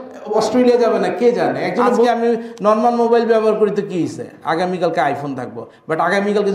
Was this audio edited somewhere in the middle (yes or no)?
yes